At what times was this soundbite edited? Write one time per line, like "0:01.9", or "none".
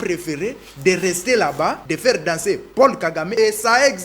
0:01.9
0:03.3